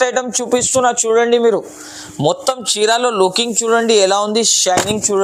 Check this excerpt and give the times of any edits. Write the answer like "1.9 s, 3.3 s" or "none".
none